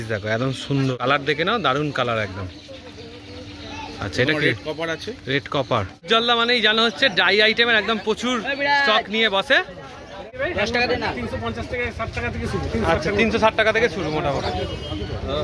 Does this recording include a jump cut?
yes; 3 cuts; at 0.9 s, 6.0 s, 10.3 s

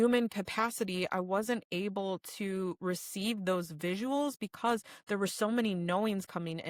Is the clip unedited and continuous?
yes; 0 cuts

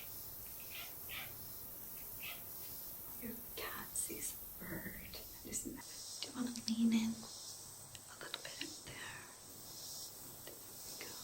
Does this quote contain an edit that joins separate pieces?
yes; 1 cut; at 5.8 s

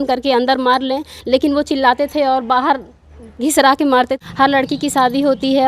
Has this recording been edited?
yes; 1 cut; at 4.2 s

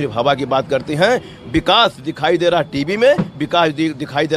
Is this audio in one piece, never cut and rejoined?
yes; 0 cuts

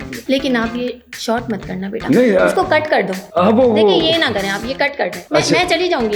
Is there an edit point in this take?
no; 0 cuts

